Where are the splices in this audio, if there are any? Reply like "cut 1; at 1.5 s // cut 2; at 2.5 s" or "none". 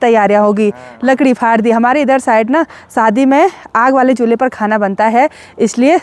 none